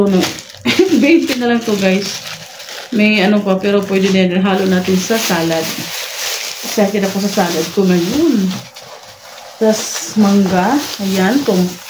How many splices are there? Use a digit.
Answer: 0